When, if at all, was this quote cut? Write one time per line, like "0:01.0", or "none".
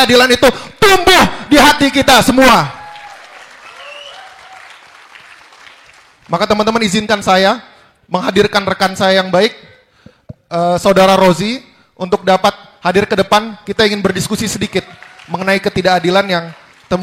none